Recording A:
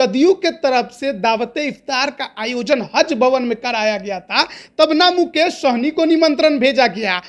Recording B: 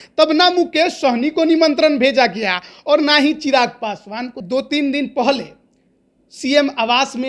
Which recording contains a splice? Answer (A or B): B